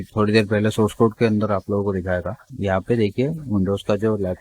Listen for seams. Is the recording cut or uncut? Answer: cut